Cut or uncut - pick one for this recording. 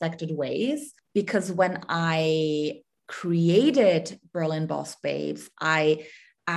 cut